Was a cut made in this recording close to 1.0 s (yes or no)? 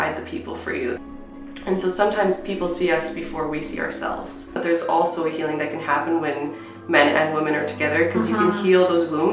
yes